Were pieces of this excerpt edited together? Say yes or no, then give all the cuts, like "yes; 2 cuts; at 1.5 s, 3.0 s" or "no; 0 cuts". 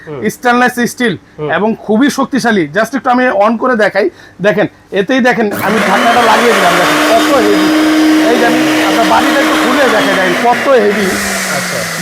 no; 0 cuts